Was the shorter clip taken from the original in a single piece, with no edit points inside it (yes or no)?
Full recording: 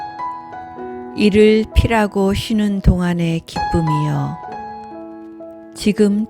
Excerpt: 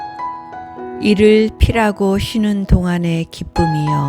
no